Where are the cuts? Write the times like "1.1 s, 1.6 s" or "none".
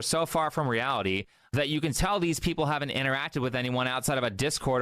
1.4 s